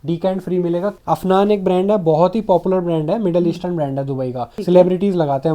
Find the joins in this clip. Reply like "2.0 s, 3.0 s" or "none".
1.0 s, 4.5 s